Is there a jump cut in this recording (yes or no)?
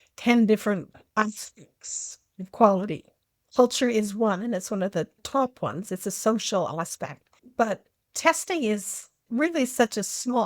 yes